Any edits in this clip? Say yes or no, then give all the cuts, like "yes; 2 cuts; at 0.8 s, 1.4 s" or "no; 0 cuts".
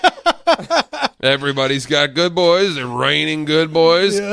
yes; 1 cut; at 1.1 s